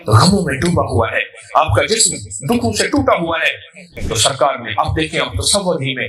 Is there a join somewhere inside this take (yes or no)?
yes